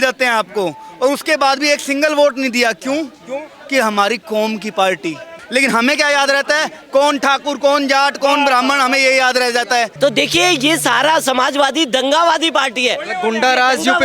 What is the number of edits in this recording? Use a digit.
2